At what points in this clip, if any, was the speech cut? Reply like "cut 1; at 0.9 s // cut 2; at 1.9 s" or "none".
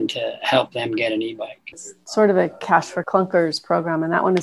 cut 1; at 1.9 s // cut 2; at 3.0 s